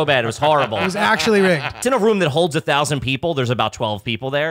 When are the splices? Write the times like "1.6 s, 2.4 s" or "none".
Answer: 1.7 s